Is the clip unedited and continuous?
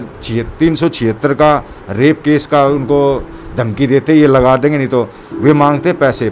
yes; 0 cuts

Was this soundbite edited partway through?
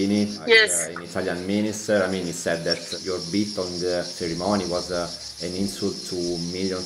no; 0 cuts

